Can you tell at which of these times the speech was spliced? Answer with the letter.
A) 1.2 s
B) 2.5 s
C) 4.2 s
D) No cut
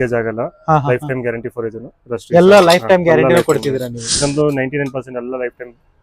C